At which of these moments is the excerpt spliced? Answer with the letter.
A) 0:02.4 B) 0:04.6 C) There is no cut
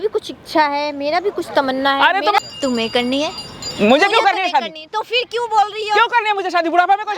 A